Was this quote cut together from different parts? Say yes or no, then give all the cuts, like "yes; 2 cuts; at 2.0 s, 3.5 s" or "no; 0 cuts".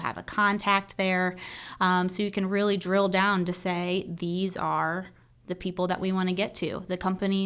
no; 0 cuts